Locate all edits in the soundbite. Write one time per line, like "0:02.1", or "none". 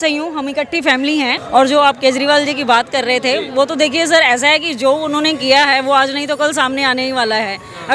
0:01.4